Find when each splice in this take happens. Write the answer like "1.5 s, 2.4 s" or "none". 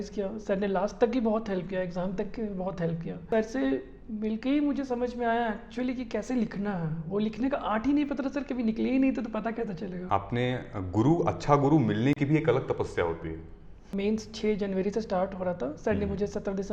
3.3 s, 9.9 s, 13.9 s